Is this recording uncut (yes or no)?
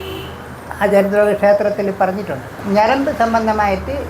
no